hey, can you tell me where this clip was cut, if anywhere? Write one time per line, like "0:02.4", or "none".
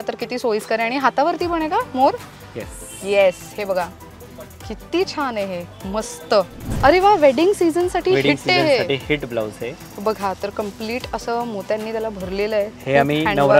0:06.6